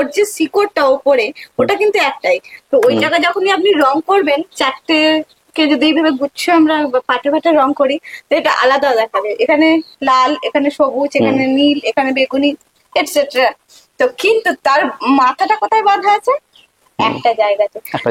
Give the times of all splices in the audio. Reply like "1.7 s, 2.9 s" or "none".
none

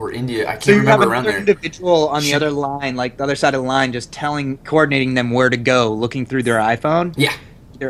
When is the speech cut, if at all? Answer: none

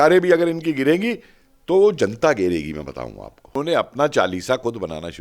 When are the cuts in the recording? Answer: 3.5 s

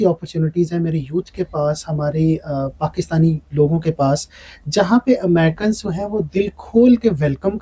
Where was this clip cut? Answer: none

